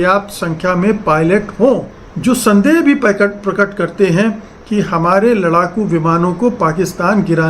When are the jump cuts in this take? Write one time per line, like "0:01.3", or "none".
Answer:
0:02.1